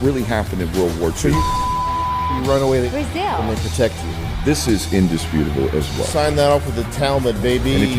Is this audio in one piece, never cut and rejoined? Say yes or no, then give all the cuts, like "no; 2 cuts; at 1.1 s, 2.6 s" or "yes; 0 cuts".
yes; 0 cuts